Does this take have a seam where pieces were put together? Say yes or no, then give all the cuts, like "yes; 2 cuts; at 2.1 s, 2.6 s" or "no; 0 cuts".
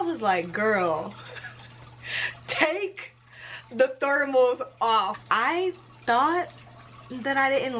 yes; 1 cut; at 5.1 s